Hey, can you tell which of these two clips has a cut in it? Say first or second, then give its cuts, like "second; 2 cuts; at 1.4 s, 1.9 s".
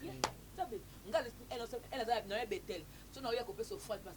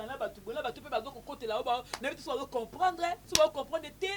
second; 1 cut; at 3.2 s